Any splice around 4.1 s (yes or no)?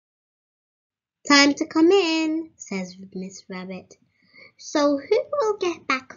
no